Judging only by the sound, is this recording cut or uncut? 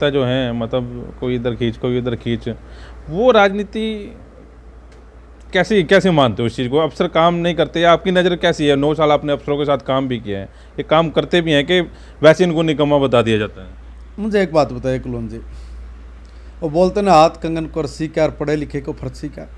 uncut